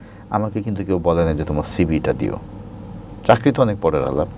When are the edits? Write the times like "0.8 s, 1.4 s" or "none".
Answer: none